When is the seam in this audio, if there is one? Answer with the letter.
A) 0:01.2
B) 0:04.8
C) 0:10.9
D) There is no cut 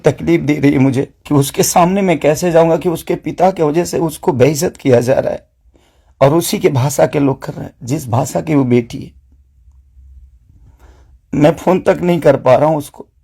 A